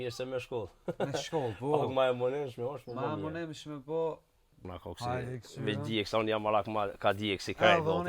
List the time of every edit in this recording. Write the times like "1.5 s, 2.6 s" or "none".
4.6 s